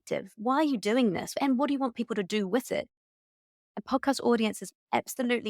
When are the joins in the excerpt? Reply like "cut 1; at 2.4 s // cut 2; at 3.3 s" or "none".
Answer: cut 1; at 1.4 s // cut 2; at 3.1 s